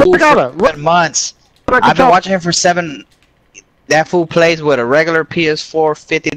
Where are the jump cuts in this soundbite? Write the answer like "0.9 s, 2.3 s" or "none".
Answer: none